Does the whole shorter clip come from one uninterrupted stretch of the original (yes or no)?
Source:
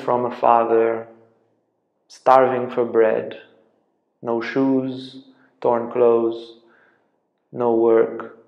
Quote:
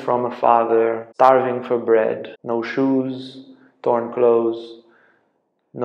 no